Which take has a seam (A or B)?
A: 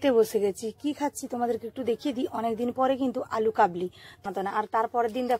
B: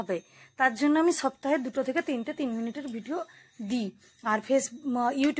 A